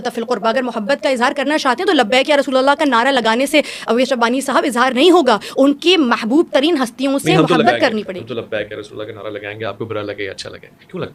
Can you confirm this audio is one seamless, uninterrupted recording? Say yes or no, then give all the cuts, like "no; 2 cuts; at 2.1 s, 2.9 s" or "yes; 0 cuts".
yes; 0 cuts